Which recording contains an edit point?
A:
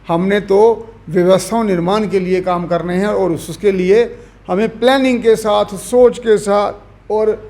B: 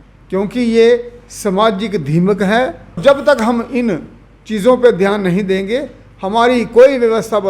B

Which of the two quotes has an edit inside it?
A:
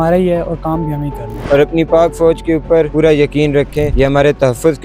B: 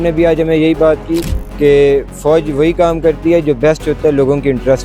A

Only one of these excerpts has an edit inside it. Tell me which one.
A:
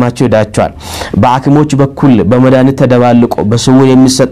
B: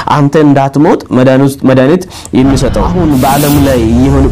B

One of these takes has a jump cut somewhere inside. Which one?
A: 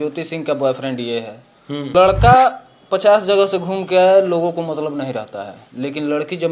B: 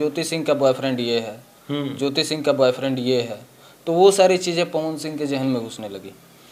A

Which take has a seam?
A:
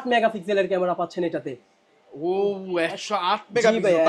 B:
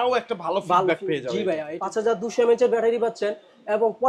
B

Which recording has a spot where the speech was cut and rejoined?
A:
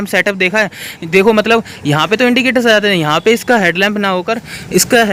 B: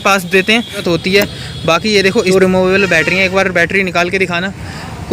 B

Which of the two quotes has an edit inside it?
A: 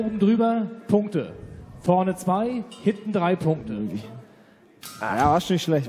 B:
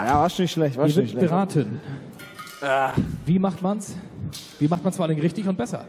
A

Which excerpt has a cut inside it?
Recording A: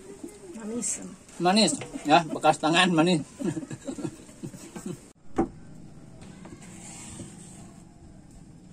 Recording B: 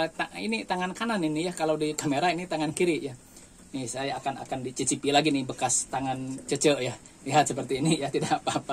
A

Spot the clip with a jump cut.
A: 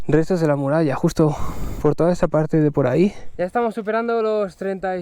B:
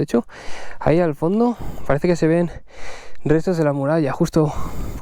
A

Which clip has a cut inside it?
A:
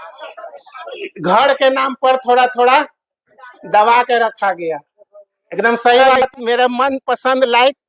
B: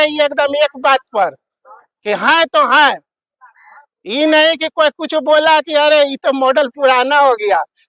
A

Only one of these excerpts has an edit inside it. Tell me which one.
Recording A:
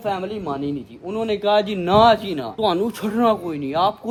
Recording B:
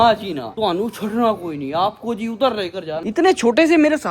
B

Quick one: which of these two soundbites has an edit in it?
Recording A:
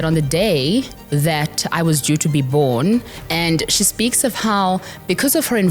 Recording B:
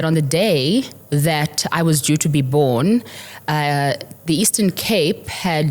A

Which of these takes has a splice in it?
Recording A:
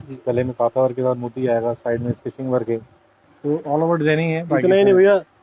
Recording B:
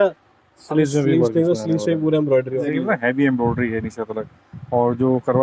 B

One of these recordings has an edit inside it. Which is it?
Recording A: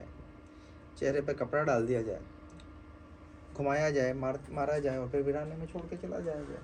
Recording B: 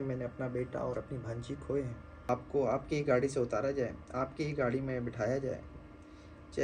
B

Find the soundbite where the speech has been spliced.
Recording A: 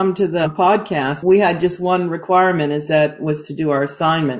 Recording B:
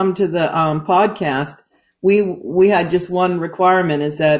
A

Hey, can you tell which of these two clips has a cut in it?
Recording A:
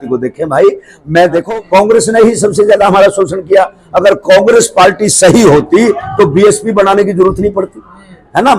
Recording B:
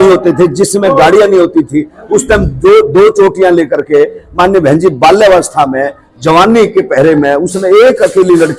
A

